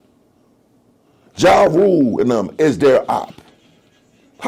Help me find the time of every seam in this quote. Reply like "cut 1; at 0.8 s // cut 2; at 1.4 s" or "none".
none